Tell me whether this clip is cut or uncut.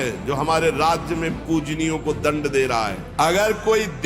cut